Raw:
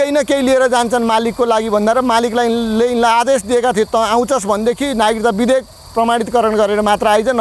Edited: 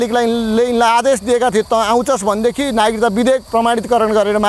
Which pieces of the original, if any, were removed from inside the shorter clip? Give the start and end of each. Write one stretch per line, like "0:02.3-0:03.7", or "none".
0:05.7-0:05.9